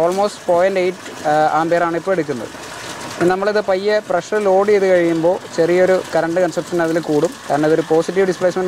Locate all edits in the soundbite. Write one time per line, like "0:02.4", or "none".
none